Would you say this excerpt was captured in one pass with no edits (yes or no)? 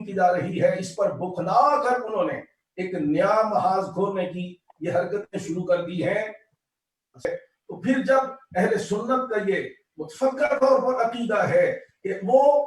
no